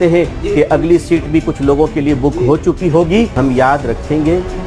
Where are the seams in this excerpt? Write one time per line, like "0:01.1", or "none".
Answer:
0:03.3